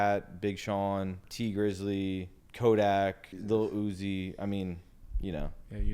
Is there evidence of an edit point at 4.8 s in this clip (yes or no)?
no